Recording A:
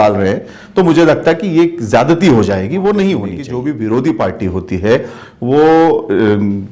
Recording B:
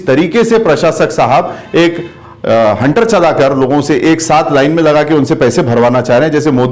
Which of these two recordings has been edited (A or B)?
A